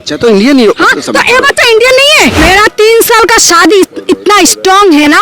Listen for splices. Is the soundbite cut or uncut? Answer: cut